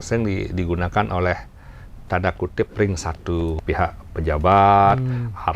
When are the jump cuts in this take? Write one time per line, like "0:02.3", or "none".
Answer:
0:03.6